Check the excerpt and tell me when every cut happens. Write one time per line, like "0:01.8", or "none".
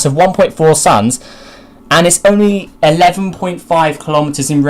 0:01.2